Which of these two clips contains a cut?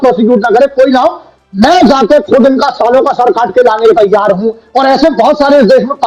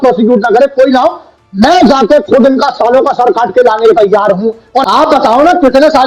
second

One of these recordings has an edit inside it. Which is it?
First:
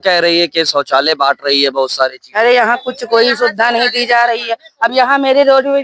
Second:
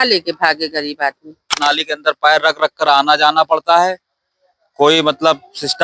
second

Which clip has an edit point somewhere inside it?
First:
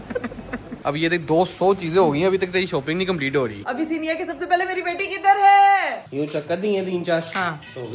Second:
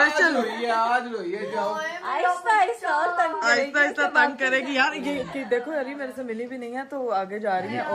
first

